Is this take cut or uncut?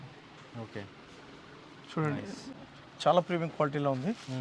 uncut